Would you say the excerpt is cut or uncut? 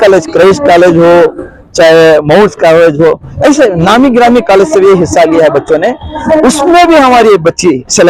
cut